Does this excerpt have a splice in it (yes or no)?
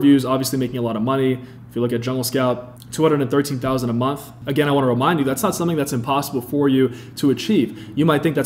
no